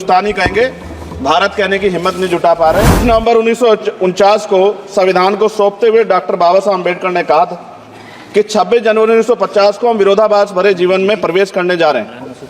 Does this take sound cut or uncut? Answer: cut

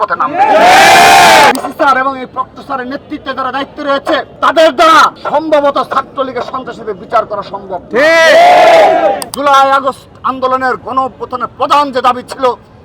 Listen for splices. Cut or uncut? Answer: cut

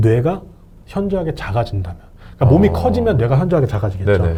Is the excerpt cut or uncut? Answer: uncut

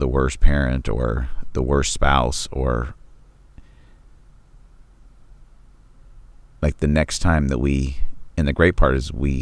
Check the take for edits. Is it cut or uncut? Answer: uncut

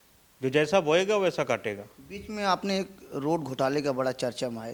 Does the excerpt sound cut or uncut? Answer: uncut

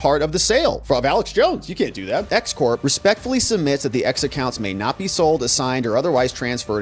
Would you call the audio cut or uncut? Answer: cut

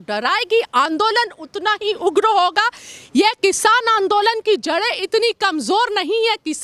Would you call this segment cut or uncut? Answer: uncut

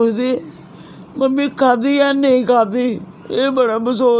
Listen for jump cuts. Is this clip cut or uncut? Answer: uncut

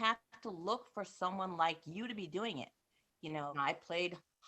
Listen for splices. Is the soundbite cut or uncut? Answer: cut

